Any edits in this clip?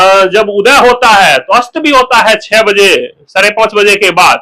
no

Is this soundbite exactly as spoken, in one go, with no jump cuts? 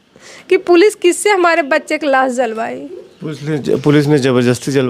yes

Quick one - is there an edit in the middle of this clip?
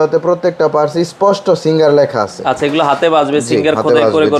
no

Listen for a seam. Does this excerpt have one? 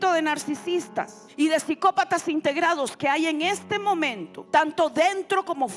yes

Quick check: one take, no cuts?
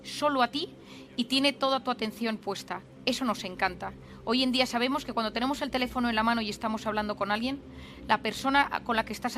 yes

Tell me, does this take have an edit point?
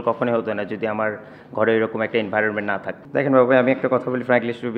yes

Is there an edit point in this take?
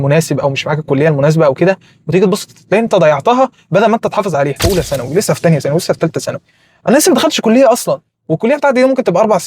yes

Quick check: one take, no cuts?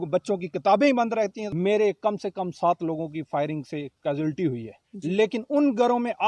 no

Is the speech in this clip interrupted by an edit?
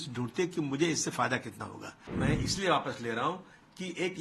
yes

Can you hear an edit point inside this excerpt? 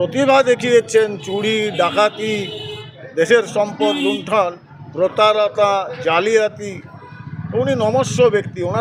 no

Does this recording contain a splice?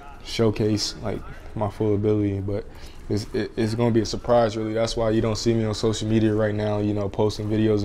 no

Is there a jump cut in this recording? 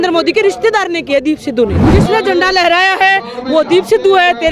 yes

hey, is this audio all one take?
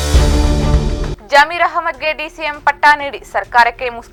yes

